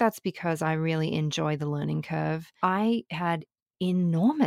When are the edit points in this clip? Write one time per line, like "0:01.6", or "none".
0:02.5